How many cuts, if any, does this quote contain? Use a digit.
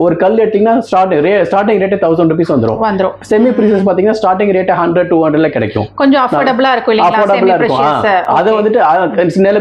0